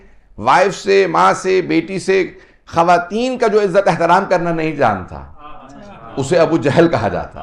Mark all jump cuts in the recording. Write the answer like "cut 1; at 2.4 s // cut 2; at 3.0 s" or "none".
none